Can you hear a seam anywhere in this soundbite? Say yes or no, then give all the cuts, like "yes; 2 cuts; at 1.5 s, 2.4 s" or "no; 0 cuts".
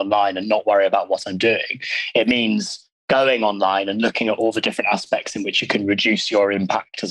no; 0 cuts